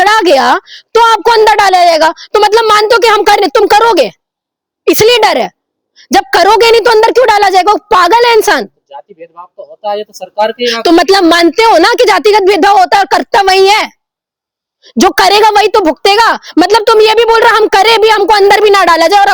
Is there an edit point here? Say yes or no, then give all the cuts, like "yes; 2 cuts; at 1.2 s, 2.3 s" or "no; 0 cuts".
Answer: no; 0 cuts